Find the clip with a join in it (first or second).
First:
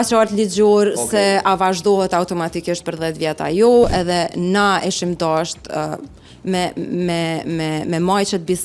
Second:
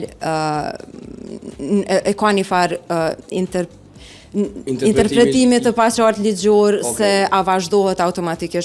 first